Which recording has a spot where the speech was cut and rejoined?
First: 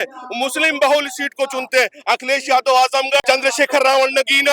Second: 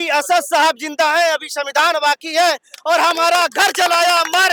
first; 1 cut; at 3.2 s

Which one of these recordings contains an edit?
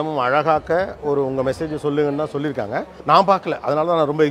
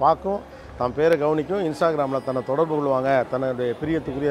first; 1 cut; at 2.9 s

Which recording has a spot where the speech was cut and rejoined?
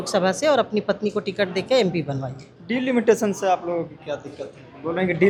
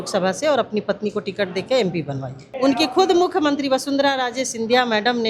second; 1 cut; at 2.4 s

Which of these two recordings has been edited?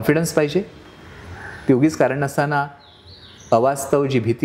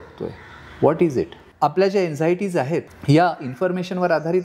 second; 2 cuts; at 1.4 s, 2.9 s

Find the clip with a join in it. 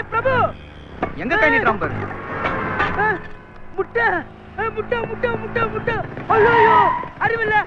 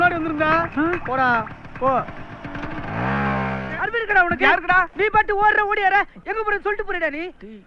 second; 1 cut; at 3.9 s

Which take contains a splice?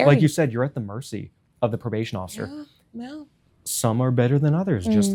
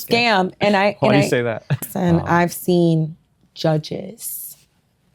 second; 1 cut; at 1.8 s

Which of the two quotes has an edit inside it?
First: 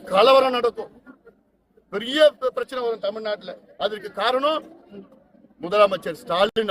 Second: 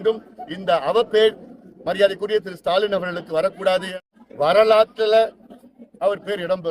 second; 1 cut; at 4.0 s

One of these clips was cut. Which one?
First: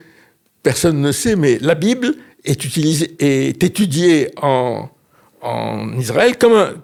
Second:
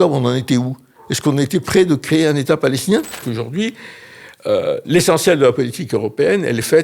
second; 1 cut; at 3.2 s

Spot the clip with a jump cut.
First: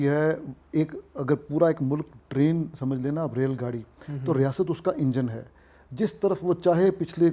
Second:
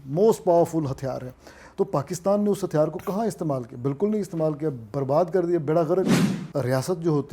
second; 1 cut; at 6.2 s

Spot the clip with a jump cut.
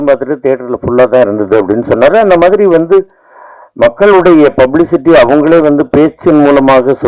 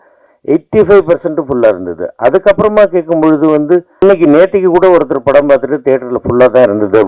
second; 1 cut; at 4.0 s

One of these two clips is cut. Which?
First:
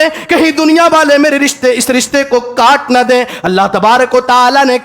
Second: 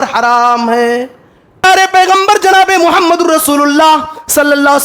second; 1 cut; at 1.6 s

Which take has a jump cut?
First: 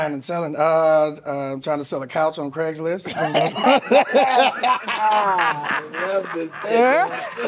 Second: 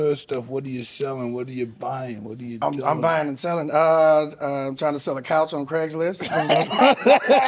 first; 1 cut; at 6.6 s

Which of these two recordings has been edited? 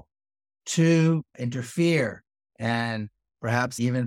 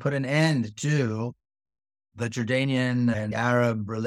second; 2 cuts; at 2.2 s, 3.3 s

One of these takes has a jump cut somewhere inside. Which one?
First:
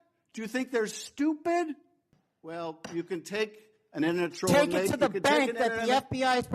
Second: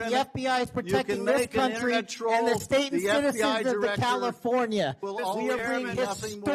first; 1 cut; at 2.0 s

